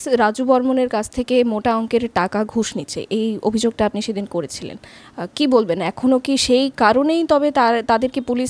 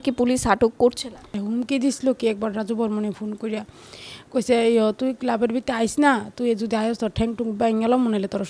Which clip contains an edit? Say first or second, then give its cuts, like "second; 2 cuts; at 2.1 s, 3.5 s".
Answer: second; 1 cut; at 1.3 s